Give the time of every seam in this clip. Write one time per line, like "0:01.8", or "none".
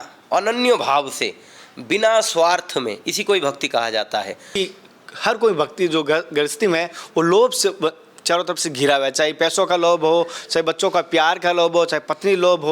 0:04.6